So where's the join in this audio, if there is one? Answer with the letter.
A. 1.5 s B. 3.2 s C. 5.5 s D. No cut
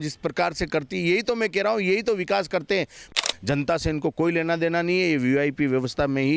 B